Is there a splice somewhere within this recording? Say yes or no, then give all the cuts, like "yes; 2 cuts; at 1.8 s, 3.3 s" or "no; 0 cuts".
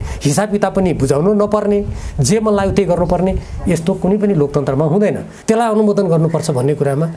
yes; 1 cut; at 5.3 s